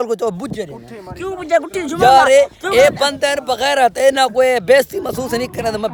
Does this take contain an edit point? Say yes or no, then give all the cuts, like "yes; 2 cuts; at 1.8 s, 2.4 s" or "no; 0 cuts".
no; 0 cuts